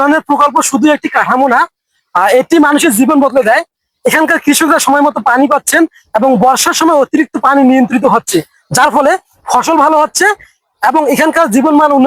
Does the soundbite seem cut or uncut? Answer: uncut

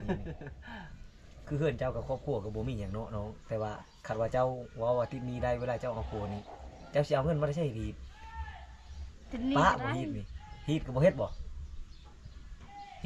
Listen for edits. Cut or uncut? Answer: uncut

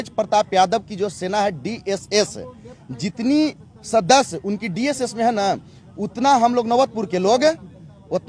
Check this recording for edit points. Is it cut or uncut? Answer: uncut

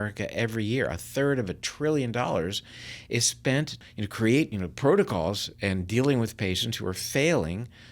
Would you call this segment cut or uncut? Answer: cut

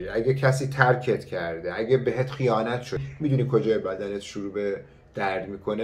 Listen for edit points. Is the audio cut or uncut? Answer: cut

